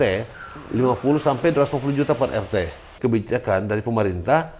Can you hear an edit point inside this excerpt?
yes; 1 cut; at 2.8 s

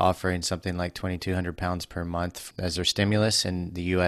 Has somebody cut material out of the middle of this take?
yes; 1 cut; at 2.4 s

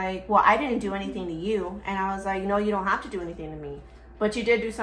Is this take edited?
no; 0 cuts

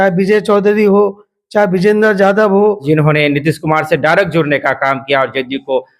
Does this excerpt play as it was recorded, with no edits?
no; 1 cut; at 2.8 s

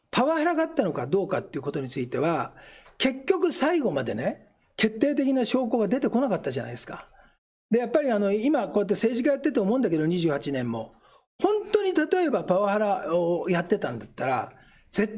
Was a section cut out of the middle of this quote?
no; 0 cuts

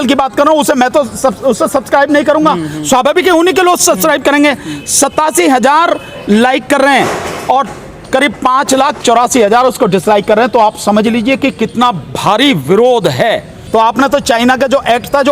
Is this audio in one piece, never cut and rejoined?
no; 1 cut; at 13.6 s

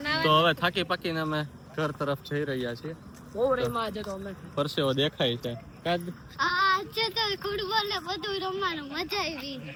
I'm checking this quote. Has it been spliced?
no; 0 cuts

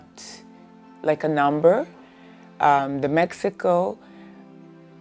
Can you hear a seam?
no; 0 cuts

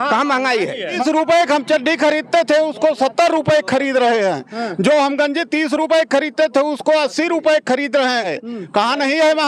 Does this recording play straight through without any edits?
no; 2 cuts; at 0.9 s, 8.4 s

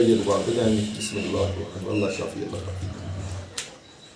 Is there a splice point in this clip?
yes; 1 cut; at 1.7 s

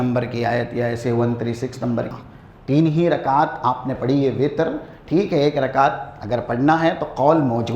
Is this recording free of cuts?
no; 1 cut; at 2.1 s

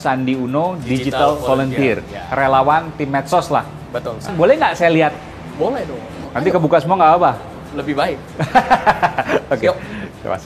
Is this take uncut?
no; 2 cuts; at 4.3 s, 6.2 s

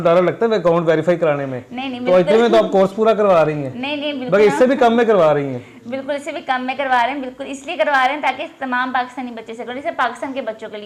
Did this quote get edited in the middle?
no; 0 cuts

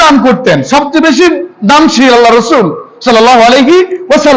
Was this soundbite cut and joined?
no; 0 cuts

